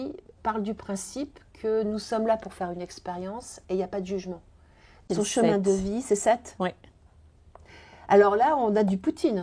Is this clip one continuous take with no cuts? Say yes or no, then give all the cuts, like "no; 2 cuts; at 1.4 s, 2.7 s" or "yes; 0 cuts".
no; 1 cut; at 5.0 s